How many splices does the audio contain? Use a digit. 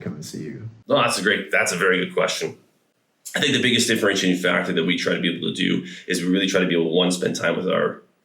0